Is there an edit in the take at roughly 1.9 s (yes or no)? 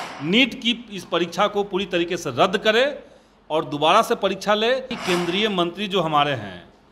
no